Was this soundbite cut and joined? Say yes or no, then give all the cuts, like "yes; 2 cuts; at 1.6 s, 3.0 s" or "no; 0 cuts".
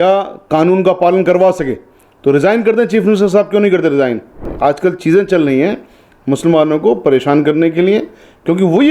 yes; 1 cut; at 4.4 s